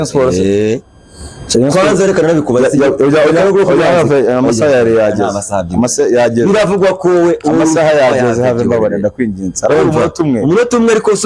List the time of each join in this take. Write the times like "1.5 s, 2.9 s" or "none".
none